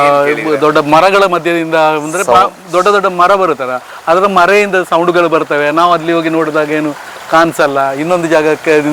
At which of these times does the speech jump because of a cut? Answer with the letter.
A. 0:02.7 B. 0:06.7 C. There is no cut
C